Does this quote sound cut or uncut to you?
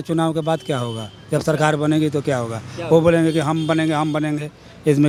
uncut